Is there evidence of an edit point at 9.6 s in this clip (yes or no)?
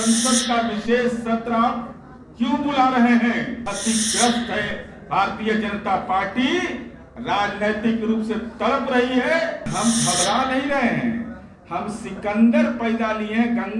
yes